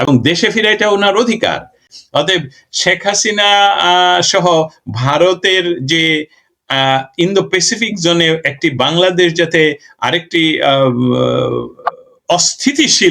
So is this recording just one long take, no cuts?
no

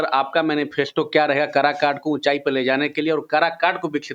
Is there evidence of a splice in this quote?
no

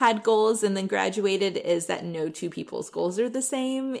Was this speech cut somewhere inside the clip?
no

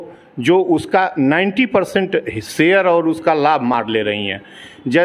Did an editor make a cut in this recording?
no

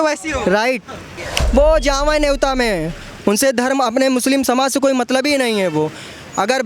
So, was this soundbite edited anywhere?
yes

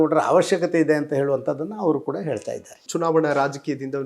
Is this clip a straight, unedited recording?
no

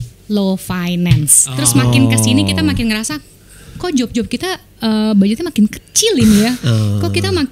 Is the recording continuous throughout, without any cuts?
no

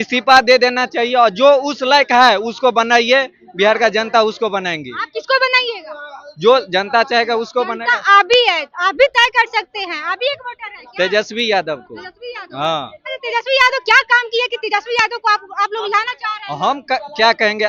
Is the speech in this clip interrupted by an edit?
no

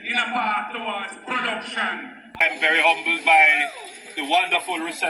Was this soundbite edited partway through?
yes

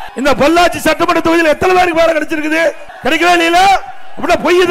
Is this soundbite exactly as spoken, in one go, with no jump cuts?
no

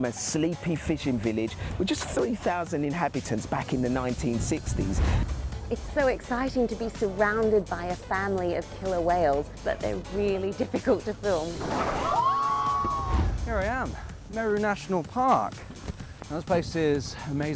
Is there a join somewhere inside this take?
yes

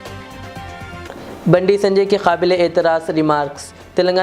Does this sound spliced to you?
yes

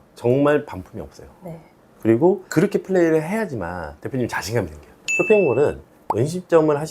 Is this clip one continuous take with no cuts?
no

